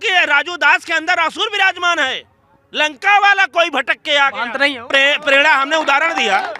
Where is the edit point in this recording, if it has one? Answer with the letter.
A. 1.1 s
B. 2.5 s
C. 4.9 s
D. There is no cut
C